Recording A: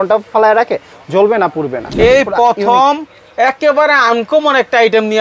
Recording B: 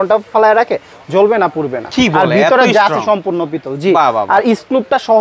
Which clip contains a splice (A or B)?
A